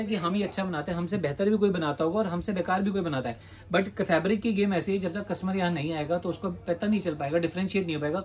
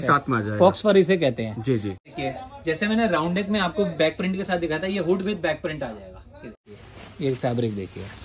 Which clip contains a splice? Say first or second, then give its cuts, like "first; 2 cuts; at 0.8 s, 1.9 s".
second; 2 cuts; at 2.0 s, 6.7 s